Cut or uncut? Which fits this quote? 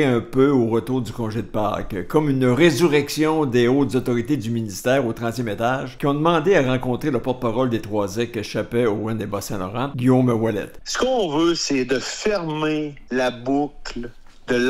cut